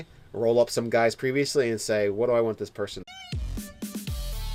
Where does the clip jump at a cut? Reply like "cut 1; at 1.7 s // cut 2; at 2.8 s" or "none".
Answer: none